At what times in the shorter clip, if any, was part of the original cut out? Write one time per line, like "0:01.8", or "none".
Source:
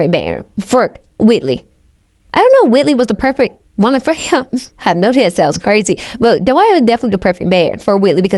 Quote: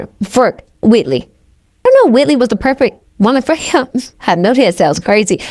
0:01.8